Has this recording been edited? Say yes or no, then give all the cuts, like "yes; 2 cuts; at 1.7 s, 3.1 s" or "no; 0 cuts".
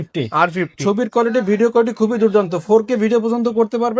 no; 0 cuts